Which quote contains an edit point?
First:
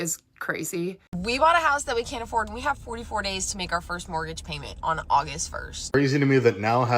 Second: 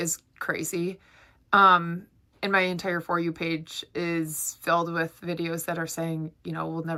first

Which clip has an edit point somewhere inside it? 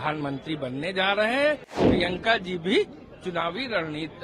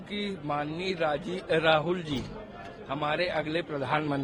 first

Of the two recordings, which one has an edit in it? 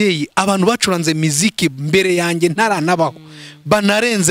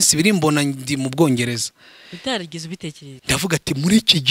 second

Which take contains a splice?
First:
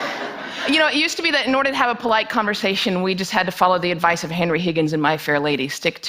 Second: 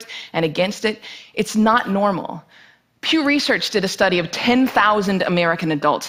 first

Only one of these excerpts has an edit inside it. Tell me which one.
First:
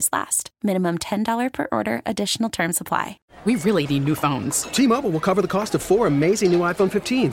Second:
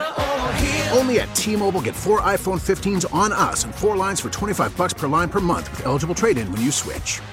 first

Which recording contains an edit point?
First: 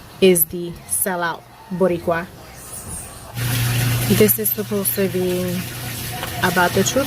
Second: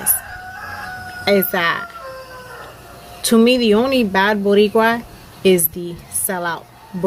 first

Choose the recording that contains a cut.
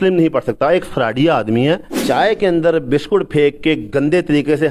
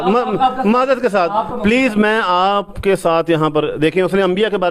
first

